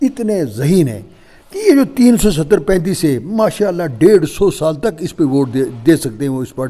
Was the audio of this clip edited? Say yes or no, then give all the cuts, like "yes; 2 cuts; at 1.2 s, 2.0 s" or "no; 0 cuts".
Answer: no; 0 cuts